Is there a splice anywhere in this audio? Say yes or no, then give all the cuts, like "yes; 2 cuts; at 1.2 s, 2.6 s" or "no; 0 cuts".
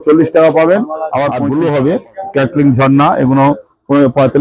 yes; 1 cut; at 1.4 s